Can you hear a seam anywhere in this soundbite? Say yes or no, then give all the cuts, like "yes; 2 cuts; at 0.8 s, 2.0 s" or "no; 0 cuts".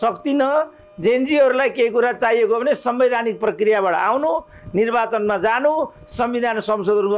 no; 0 cuts